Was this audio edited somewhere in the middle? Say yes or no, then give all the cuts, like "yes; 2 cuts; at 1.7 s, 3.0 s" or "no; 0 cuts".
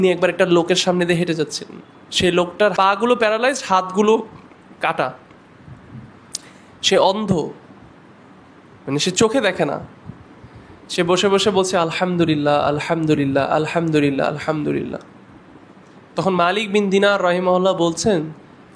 yes; 1 cut; at 2.7 s